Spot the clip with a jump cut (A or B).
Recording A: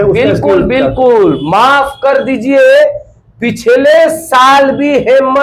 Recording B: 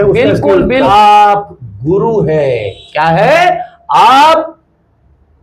B